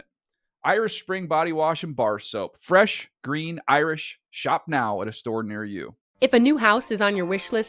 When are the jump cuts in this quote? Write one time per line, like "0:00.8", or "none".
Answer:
0:06.0